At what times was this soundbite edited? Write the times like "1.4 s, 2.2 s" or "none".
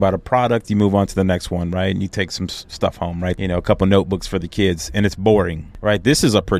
3.4 s, 5.6 s